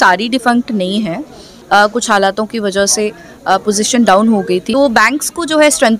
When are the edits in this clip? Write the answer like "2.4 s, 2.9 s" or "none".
1.5 s, 4.7 s